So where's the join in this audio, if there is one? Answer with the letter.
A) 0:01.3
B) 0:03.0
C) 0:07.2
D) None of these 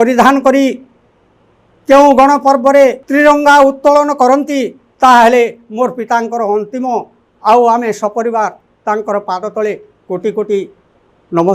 B